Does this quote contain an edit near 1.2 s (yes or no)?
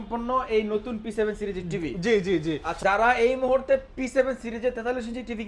no